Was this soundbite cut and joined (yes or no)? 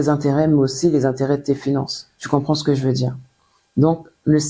no